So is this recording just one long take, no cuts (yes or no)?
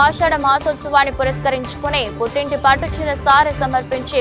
yes